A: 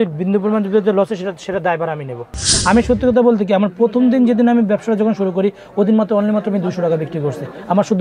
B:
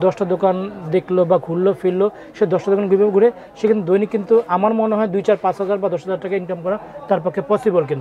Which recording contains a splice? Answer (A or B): A